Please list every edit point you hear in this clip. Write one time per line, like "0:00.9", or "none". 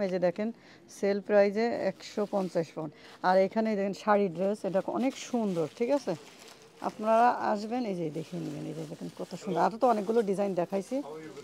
none